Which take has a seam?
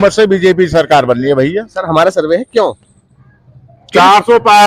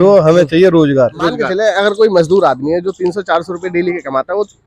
second; 1 cut; at 1.5 s

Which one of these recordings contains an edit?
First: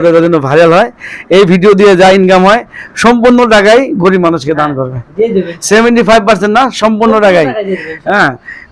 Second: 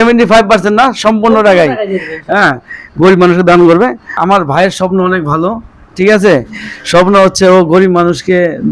second; 1 cut; at 4.1 s

